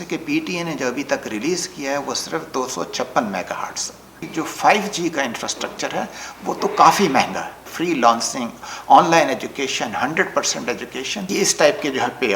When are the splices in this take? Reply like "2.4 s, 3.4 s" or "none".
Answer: 4.2 s, 7.7 s, 11.3 s